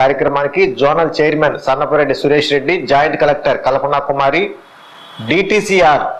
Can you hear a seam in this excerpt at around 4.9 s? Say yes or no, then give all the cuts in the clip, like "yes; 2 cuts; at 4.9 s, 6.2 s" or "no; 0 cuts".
no; 0 cuts